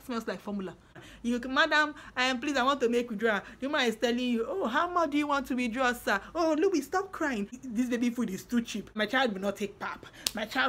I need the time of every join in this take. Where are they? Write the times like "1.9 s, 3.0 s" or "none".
1.0 s, 7.6 s, 8.9 s